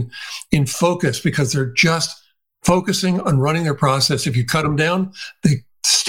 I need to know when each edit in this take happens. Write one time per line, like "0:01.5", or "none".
none